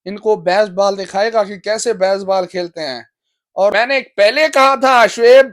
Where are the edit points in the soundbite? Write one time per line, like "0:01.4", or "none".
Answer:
0:03.7

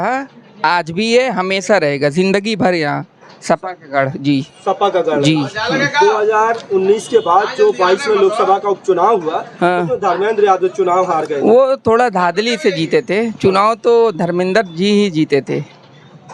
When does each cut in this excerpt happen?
none

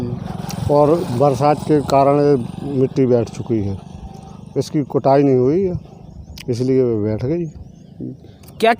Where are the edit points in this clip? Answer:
none

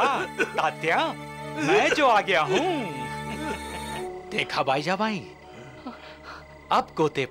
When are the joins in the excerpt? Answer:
0:04.0

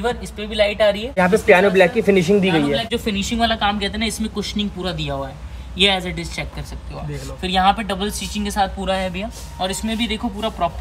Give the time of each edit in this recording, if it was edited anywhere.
0:01.2
0:02.9

